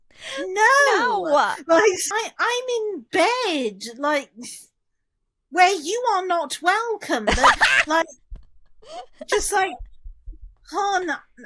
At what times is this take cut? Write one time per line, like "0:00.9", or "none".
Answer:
0:02.1